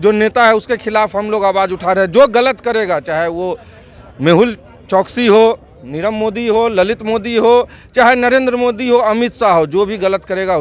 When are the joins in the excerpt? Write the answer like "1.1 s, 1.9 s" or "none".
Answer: none